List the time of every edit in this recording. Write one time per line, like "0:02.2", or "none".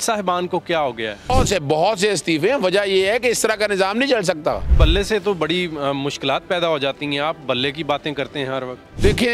0:01.3
0:04.7